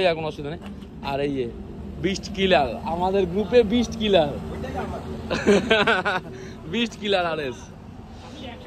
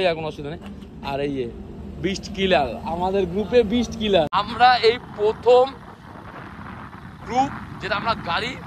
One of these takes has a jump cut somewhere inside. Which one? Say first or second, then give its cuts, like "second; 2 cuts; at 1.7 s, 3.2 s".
second; 1 cut; at 4.3 s